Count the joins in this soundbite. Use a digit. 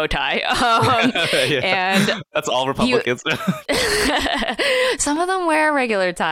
2